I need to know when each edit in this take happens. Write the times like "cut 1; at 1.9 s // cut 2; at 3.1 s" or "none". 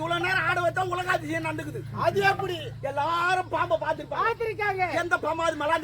none